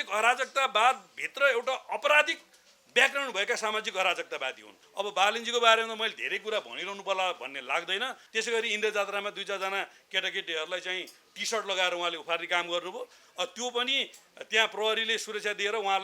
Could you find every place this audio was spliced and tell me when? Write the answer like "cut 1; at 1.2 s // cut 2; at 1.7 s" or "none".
cut 1; at 4.8 s // cut 2; at 8.2 s